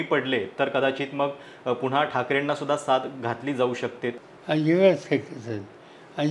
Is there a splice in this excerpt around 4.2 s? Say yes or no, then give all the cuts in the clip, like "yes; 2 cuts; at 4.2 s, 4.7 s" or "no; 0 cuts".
yes; 1 cut; at 4.2 s